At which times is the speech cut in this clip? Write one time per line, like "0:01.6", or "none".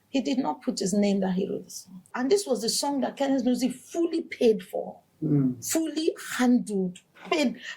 0:02.1